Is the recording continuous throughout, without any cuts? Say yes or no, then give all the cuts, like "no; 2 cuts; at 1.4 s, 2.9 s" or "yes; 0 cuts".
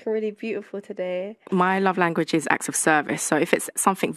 no; 1 cut; at 1.5 s